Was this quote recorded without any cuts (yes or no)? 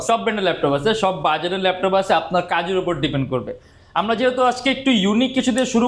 yes